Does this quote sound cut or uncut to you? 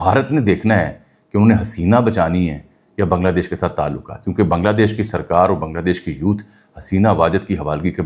uncut